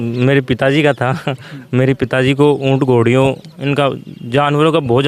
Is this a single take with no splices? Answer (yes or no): yes